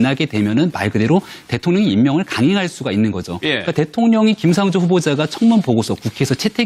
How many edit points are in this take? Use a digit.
1